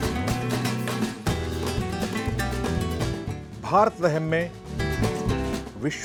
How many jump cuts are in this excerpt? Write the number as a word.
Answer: zero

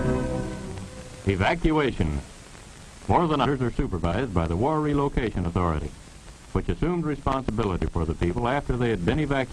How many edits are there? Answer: zero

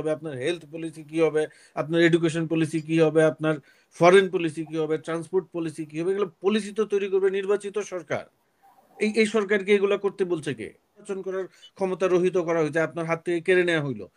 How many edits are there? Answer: one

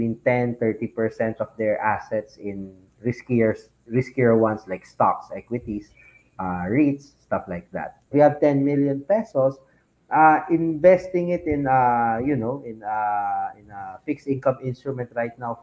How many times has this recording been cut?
one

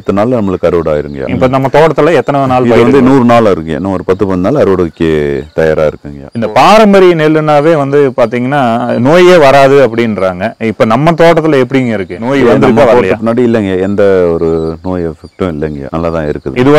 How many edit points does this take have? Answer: one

